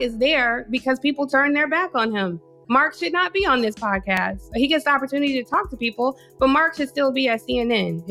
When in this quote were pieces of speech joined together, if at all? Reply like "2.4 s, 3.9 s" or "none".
none